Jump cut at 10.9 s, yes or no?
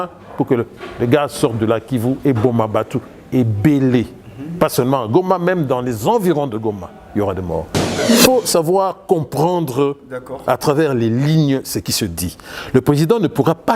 no